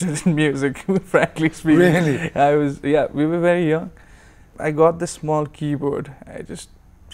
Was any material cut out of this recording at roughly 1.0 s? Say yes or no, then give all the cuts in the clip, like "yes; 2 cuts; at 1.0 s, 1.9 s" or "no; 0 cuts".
no; 1 cut; at 4.5 s